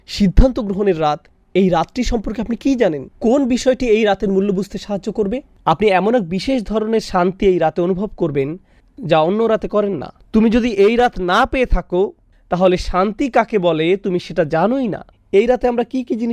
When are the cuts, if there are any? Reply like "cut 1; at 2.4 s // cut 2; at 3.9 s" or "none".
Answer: cut 1; at 5.5 s // cut 2; at 10.1 s // cut 3; at 15.0 s